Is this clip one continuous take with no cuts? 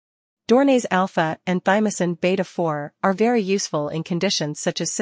no; 1 cut; at 3.3 s

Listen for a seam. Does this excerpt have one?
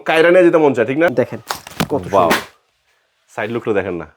yes; 1 cut; at 1.1 s

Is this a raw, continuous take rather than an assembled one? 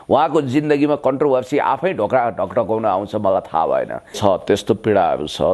no; 1 cut; at 4.1 s

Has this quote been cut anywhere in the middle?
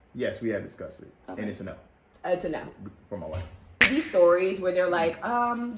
yes; 1 cut; at 3.8 s

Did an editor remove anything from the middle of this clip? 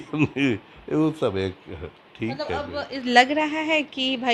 no; 0 cuts

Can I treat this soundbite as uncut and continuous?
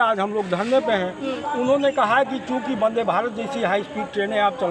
yes; 0 cuts

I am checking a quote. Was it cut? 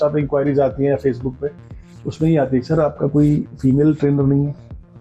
no; 0 cuts

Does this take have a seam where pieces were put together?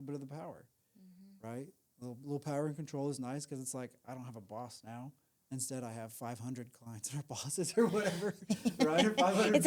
no; 0 cuts

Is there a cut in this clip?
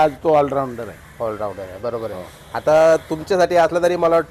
no; 0 cuts

